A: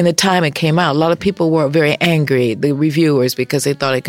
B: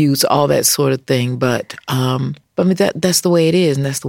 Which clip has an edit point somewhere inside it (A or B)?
B